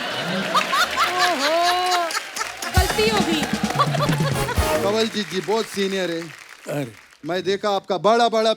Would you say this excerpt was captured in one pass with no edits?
no; 1 cut; at 4.8 s

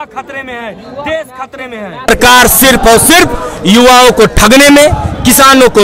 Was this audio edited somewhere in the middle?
yes; 1 cut; at 2.1 s

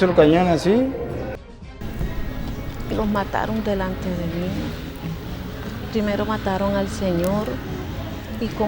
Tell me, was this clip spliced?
yes; 1 cut; at 1.4 s

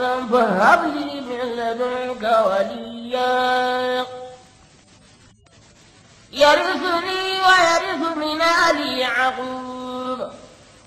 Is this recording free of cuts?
no; 1 cut; at 8.3 s

